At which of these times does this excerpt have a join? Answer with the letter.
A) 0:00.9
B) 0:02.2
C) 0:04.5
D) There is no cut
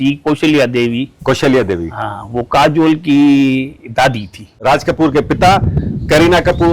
C